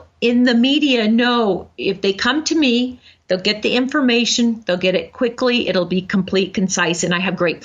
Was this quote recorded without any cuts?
yes; 0 cuts

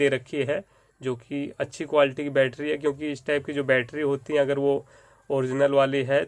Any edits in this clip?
no; 0 cuts

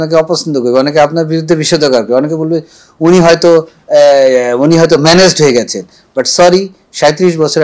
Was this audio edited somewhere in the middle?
no; 0 cuts

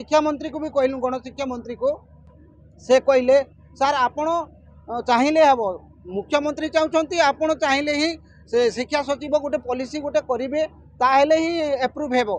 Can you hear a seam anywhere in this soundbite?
no; 0 cuts

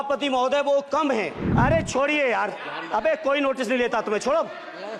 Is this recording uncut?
no; 1 cut; at 1.4 s

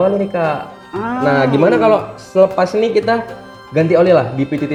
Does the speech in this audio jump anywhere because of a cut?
no; 0 cuts

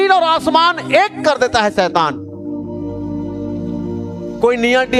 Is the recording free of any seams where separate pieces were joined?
yes; 0 cuts

